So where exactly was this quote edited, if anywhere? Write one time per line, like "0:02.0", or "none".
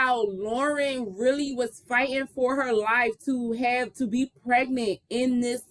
none